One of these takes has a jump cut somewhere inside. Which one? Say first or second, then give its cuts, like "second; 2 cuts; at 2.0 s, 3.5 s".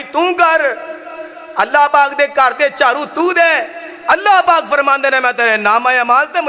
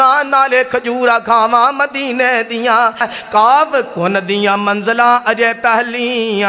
second; 1 cut; at 3.1 s